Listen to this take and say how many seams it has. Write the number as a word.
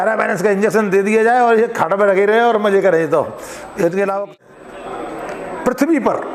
one